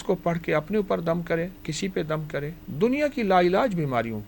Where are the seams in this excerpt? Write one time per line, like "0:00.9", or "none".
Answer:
0:01.6
0:02.6